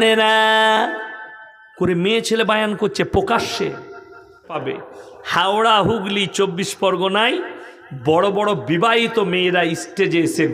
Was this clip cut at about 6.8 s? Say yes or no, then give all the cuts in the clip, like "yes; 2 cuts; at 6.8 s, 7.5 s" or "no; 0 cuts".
no; 1 cut; at 4.5 s